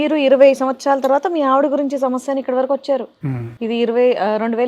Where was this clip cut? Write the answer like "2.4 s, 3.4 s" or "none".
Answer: none